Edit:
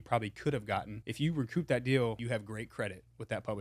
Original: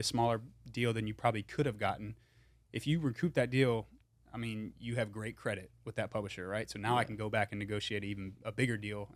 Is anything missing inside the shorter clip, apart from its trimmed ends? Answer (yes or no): yes